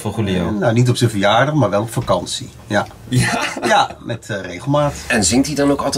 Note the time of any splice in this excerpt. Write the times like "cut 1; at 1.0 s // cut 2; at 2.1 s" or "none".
cut 1; at 5.0 s